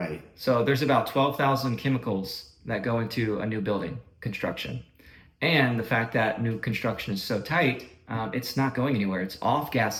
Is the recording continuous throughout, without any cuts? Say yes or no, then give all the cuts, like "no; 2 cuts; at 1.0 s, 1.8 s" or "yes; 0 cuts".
yes; 0 cuts